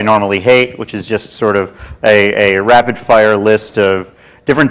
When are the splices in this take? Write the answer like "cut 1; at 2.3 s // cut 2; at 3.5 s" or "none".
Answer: none